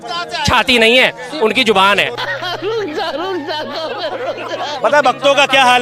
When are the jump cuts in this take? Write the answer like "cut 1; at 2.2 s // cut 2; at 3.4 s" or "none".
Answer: cut 1; at 2.2 s // cut 2; at 4.7 s